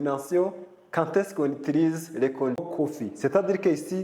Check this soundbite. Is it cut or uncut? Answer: cut